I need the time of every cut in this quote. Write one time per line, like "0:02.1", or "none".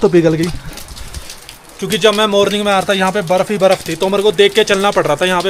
none